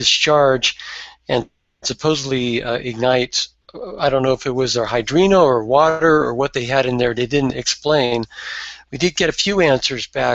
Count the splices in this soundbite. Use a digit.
1